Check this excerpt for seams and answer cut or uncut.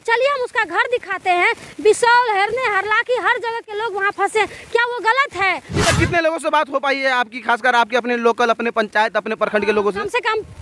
cut